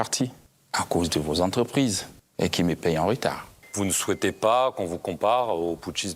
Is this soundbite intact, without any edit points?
no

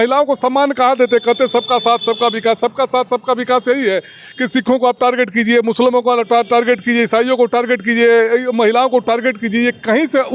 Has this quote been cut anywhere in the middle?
no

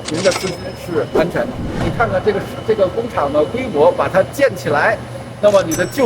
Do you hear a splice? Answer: yes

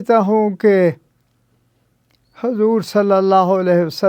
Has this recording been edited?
no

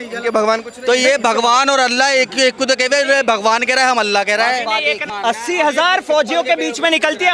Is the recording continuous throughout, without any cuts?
no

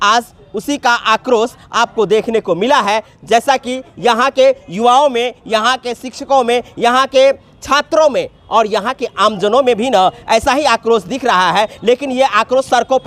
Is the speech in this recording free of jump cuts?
yes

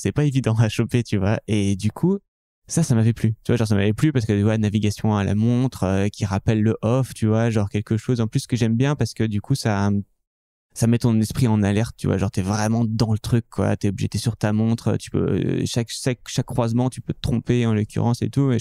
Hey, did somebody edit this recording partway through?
no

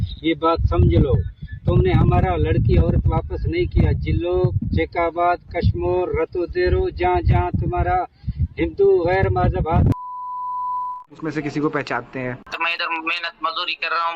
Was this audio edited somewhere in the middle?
yes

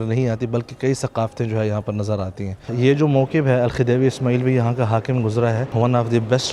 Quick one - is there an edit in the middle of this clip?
yes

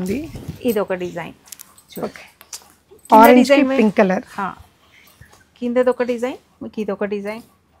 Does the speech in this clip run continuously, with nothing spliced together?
yes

